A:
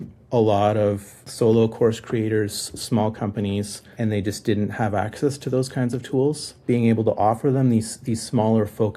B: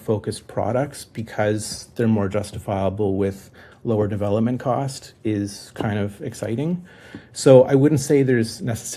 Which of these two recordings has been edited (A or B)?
A